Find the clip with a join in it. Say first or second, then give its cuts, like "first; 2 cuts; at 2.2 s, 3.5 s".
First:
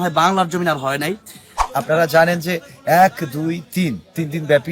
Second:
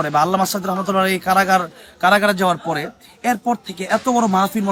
first; 1 cut; at 1.6 s